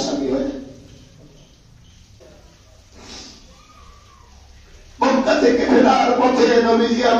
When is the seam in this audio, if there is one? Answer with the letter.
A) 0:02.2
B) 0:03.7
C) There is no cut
A